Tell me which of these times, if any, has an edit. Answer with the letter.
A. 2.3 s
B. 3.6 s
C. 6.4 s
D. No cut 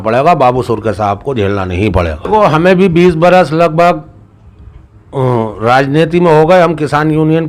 A